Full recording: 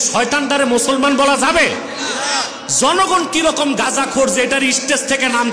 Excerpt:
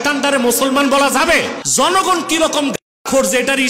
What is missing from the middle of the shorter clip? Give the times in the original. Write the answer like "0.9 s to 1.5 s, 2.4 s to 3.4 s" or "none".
1.9 s to 2.6 s

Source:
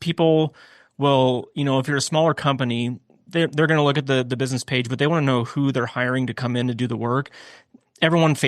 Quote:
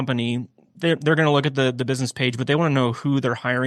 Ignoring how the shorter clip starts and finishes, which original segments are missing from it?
none

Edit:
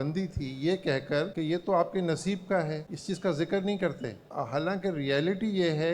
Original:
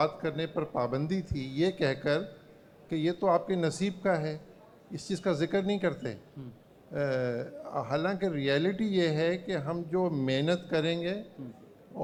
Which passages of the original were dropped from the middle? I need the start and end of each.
2.2 s to 2.8 s, 4.4 s to 4.9 s, 6.3 s to 7.6 s

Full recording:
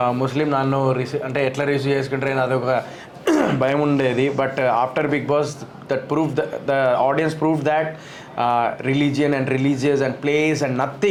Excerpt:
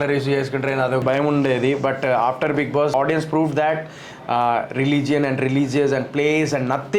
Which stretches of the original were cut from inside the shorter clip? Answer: 2.6 s to 3.6 s, 5.5 s to 7.0 s

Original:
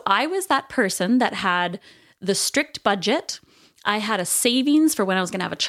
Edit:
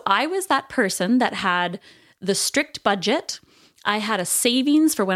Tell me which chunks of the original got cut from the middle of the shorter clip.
none

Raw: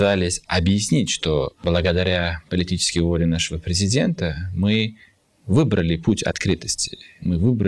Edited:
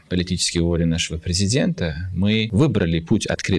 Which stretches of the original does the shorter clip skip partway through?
4.9 s to 5.4 s

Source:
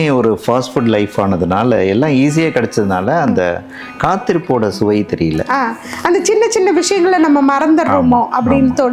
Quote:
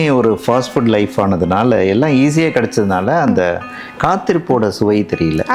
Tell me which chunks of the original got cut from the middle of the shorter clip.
none

